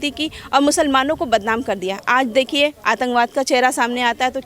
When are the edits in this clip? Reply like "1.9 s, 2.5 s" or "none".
none